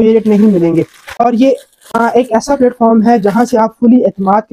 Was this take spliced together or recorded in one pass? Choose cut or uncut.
uncut